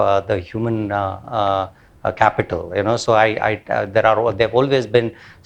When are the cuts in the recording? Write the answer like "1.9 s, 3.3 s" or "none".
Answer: none